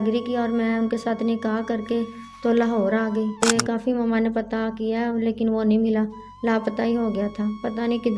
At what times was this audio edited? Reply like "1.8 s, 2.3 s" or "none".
3.4 s